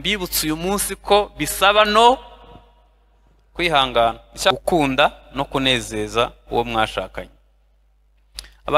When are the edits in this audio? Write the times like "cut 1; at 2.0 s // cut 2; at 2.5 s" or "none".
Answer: cut 1; at 4.5 s